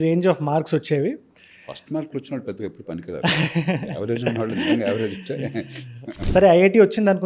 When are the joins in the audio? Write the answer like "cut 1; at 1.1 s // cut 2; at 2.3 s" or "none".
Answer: cut 1; at 6.1 s